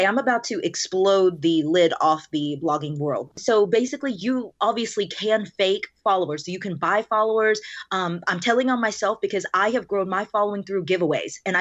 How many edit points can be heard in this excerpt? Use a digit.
1